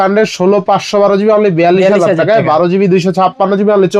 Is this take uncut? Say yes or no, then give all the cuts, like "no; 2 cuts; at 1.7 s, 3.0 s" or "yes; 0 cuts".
yes; 0 cuts